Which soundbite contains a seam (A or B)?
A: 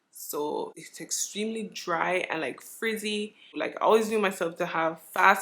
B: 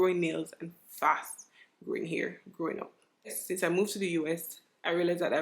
A